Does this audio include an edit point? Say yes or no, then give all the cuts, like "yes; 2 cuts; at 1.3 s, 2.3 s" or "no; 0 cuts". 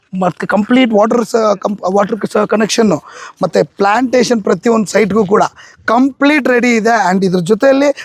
no; 0 cuts